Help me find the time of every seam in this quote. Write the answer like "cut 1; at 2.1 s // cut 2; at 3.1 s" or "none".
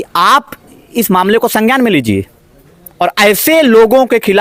none